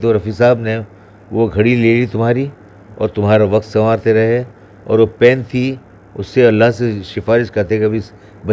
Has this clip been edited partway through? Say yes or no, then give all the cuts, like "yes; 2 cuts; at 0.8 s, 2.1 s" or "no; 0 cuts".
no; 0 cuts